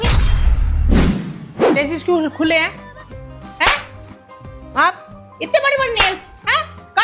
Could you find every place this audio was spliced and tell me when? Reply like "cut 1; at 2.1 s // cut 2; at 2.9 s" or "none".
cut 1; at 1.5 s

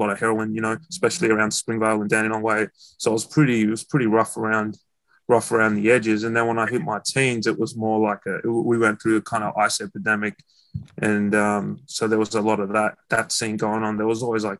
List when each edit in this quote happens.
none

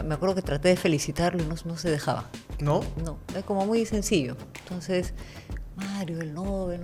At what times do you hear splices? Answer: none

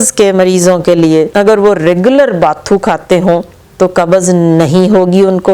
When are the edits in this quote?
cut 1; at 1.3 s

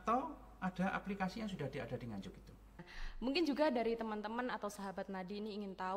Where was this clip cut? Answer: cut 1; at 3.0 s

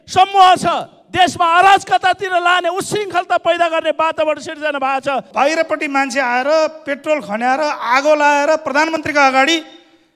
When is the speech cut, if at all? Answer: cut 1; at 5.3 s

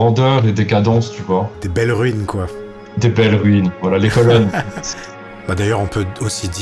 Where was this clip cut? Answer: cut 1; at 1.6 s // cut 2; at 5.3 s

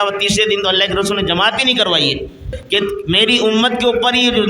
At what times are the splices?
cut 1; at 2.6 s

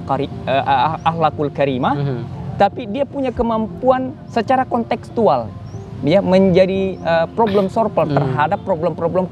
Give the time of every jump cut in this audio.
none

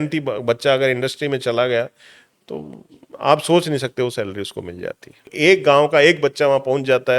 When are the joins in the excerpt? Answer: cut 1; at 5.3 s

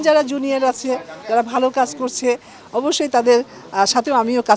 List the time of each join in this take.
none

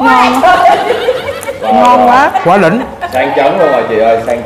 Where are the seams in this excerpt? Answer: none

